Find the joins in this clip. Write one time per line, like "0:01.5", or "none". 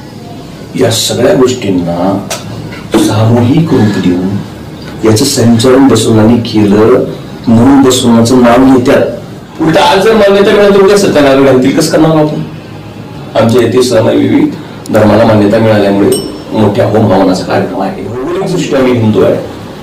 0:09.4
0:18.2